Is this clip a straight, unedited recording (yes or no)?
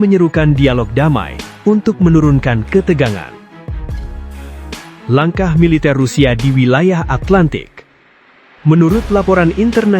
no